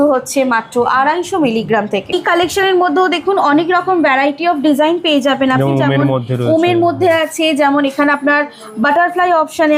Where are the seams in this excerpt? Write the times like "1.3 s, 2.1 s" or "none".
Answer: none